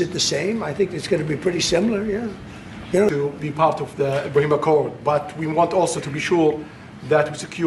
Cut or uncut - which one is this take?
cut